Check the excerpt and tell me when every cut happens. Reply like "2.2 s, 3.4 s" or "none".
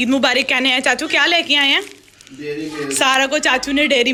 none

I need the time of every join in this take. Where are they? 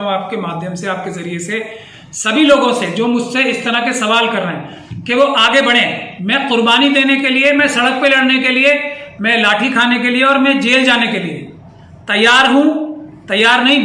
none

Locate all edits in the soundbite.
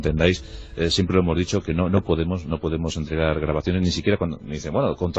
2.3 s

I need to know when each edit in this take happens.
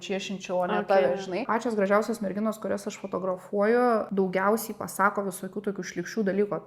1.4 s, 4.1 s

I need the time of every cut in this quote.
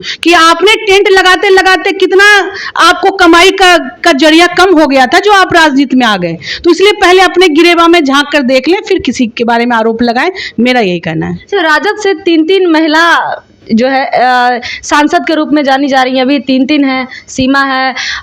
none

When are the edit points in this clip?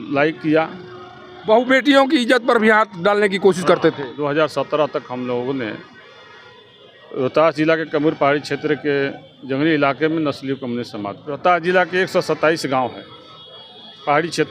4.2 s, 11.2 s

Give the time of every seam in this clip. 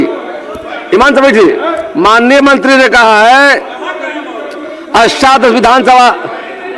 none

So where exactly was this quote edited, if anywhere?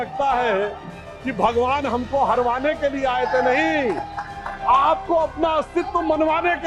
none

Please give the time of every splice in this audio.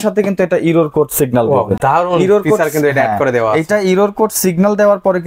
none

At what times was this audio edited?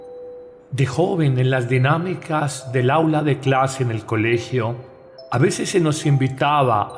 2.6 s

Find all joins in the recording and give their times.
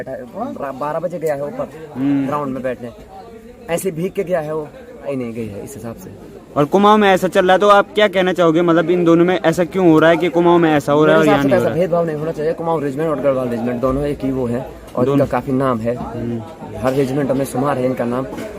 5.1 s

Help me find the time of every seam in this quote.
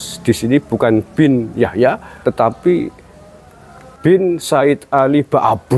2.1 s, 3.9 s

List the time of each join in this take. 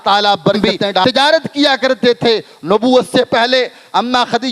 1.0 s

